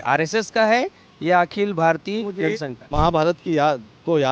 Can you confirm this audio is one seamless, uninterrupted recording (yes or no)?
no